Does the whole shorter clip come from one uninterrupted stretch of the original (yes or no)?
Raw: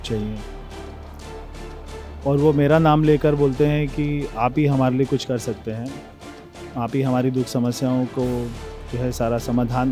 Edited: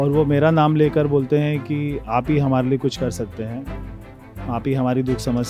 yes